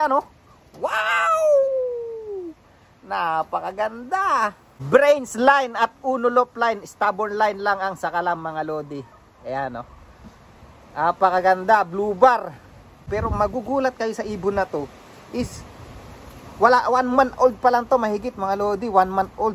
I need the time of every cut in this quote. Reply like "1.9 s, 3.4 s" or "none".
4.7 s, 13.0 s